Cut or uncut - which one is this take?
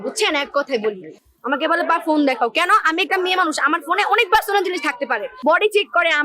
cut